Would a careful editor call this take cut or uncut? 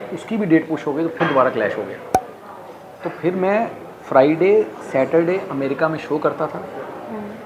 uncut